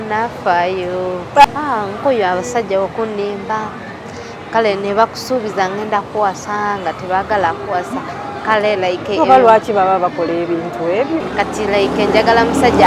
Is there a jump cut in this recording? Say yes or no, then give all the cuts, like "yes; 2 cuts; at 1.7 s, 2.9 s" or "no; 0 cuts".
yes; 2 cuts; at 1.4 s, 11.2 s